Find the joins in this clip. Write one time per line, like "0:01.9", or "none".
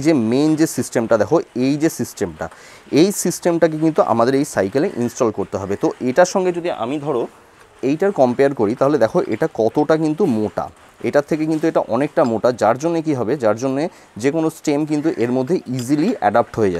none

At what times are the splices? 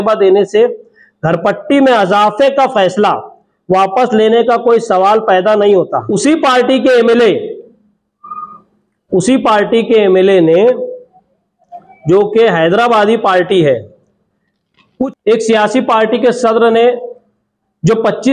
0:06.0
0:15.1

